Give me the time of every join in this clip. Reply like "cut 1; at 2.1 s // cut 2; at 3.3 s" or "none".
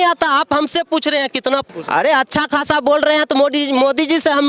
cut 1; at 1.7 s